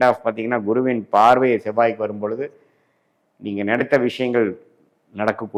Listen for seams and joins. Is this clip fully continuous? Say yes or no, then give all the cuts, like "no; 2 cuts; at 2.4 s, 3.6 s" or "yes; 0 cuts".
yes; 0 cuts